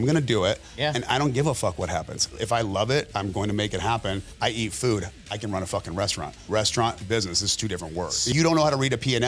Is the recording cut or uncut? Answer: cut